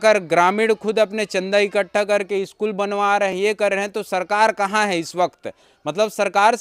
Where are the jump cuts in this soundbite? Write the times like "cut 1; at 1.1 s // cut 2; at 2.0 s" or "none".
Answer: none